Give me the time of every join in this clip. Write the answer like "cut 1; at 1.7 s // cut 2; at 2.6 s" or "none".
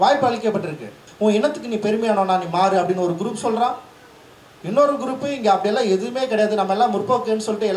cut 1; at 1.0 s